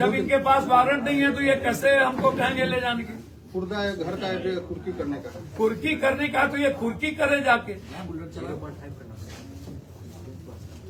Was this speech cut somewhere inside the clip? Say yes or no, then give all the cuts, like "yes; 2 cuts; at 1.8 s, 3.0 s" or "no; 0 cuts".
no; 0 cuts